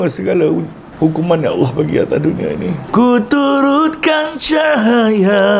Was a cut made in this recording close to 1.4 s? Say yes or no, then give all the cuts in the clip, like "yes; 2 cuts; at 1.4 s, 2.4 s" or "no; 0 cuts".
no; 1 cut; at 2.9 s